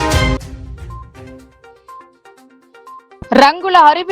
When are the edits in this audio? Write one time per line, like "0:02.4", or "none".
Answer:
none